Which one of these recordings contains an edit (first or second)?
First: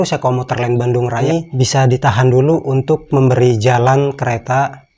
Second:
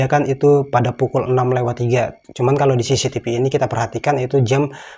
first